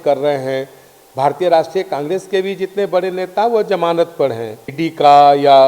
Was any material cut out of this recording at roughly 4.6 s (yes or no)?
yes